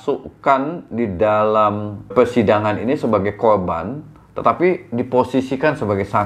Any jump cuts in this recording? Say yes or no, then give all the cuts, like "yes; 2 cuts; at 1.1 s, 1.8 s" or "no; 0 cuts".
yes; 1 cut; at 2.1 s